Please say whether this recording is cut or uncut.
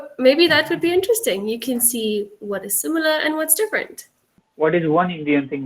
cut